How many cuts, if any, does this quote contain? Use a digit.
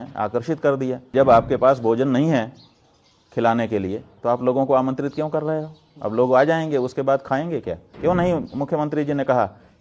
2